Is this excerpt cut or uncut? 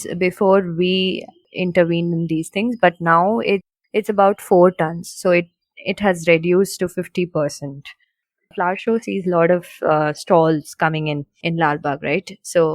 cut